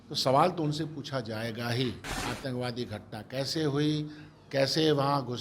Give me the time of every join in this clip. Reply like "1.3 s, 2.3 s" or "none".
2.1 s

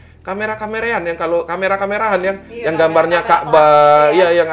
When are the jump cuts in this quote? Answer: none

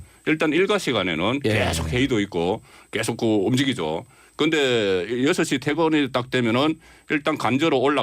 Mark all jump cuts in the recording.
5.6 s

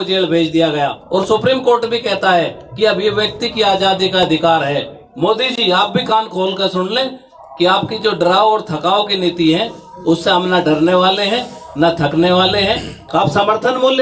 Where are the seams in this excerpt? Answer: 1.0 s, 5.0 s, 12.9 s

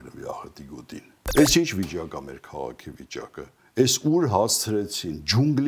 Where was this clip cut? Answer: 1.2 s

